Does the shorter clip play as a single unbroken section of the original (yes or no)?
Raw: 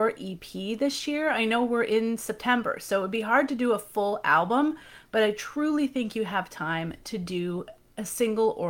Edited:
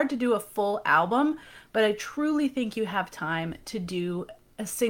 yes